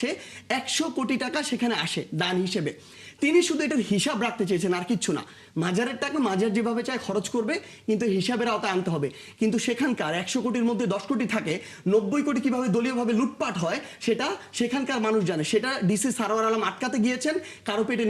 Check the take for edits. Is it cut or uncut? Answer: uncut